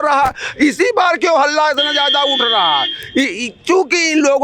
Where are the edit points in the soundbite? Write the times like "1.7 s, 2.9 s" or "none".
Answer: none